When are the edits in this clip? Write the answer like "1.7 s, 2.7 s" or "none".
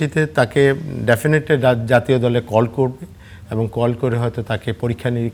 none